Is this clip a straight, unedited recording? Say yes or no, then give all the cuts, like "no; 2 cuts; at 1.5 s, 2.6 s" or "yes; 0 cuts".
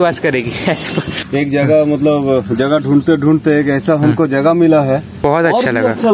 no; 2 cuts; at 1.3 s, 5.1 s